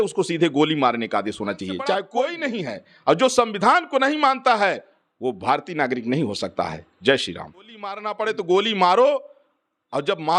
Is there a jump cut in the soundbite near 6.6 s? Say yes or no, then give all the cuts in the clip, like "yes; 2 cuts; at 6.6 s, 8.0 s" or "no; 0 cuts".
no; 2 cuts; at 2.1 s, 8.0 s